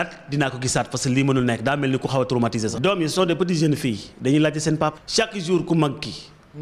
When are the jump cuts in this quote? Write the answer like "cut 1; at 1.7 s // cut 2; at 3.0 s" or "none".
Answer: cut 1; at 2.7 s // cut 2; at 5.0 s